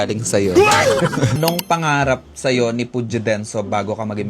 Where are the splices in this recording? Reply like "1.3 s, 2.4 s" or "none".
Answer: 1.4 s